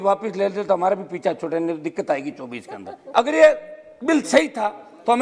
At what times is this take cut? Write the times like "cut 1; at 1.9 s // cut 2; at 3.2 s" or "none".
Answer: cut 1; at 3.0 s